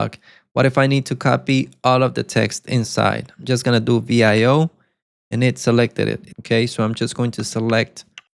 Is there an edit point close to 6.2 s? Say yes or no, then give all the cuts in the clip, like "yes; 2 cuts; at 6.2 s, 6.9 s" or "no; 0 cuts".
yes; 1 cut; at 6.2 s